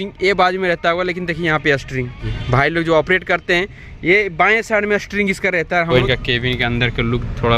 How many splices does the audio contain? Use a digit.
2